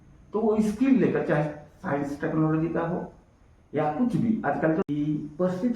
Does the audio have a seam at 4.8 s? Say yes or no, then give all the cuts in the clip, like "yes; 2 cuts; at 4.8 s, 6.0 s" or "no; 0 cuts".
yes; 1 cut; at 4.8 s